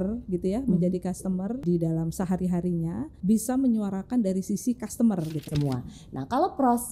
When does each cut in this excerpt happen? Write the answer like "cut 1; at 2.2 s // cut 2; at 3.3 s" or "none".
cut 1; at 1.6 s // cut 2; at 3.1 s // cut 3; at 5.5 s